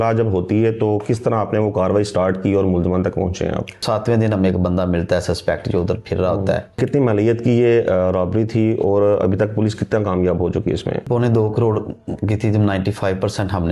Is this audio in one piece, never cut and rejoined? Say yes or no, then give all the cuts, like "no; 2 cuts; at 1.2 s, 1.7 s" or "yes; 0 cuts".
no; 3 cuts; at 3.8 s, 6.8 s, 11.1 s